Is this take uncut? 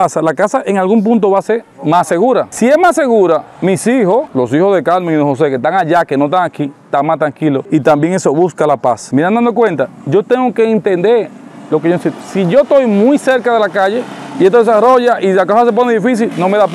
yes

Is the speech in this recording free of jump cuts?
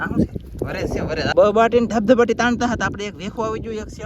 no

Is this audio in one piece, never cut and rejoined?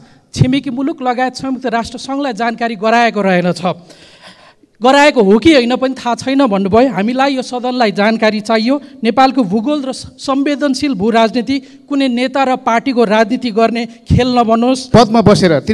no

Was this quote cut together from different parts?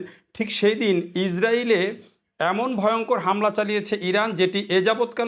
no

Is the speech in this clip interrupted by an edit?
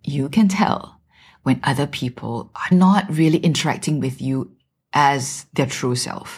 yes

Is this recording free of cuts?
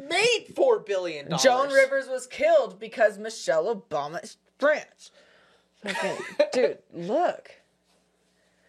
yes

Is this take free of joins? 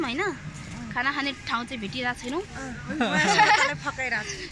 yes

